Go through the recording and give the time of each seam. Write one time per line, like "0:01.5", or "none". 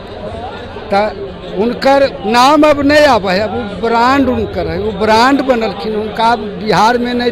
none